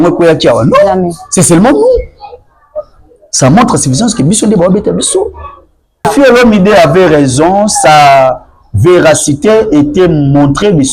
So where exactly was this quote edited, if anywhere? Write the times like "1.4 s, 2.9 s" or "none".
6.1 s